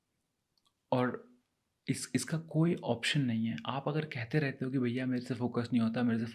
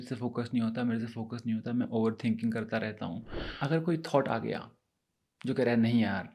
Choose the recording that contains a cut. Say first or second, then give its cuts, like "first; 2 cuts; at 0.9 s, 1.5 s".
second; 1 cut; at 3.5 s